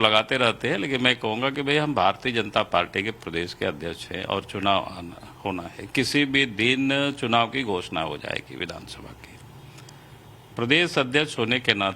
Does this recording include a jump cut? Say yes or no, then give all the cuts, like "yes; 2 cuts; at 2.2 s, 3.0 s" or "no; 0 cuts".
yes; 1 cut; at 5.6 s